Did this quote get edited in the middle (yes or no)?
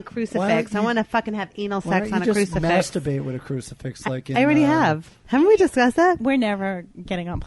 yes